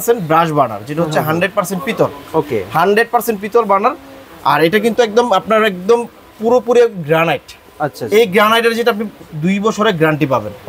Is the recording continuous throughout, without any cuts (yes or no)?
yes